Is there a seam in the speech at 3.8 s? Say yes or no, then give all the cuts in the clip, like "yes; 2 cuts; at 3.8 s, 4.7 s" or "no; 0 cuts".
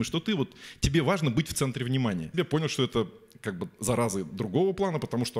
no; 1 cut; at 2.3 s